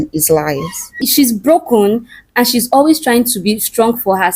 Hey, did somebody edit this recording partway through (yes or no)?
yes